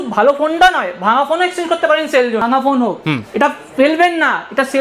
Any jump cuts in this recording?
yes; 1 cut; at 2.4 s

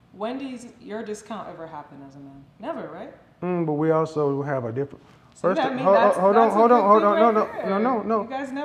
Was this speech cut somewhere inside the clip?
no; 0 cuts

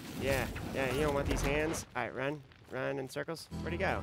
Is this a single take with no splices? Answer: no; 1 cut; at 2.1 s

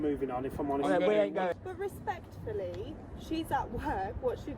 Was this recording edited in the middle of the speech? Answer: yes; 1 cut; at 1.5 s

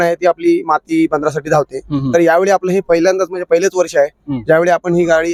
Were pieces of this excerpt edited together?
no; 0 cuts

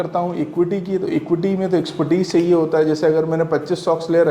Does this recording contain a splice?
no; 0 cuts

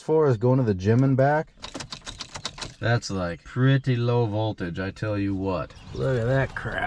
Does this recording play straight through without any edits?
no; 2 cuts; at 1.5 s, 5.8 s

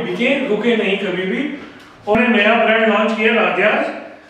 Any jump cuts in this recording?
yes; 1 cut; at 2.2 s

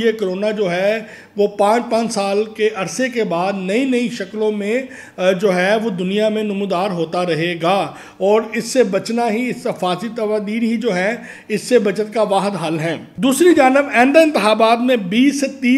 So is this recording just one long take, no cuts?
yes; 0 cuts

